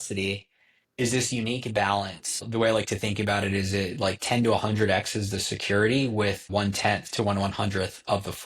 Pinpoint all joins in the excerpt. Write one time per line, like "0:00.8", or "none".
0:02.5
0:06.5